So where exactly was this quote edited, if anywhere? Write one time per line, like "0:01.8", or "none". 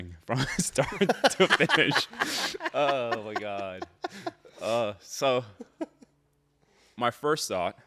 none